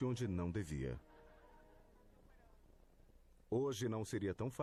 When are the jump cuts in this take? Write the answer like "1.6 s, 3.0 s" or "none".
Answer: none